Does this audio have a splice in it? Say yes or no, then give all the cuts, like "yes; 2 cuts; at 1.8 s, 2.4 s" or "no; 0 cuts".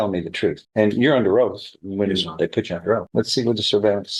no; 0 cuts